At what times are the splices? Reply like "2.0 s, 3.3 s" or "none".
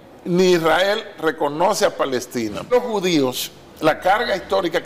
2.7 s